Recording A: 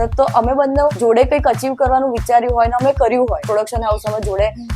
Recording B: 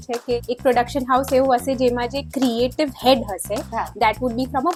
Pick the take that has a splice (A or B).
A